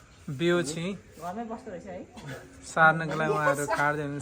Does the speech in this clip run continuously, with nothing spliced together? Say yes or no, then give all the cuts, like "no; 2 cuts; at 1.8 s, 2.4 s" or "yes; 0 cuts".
yes; 0 cuts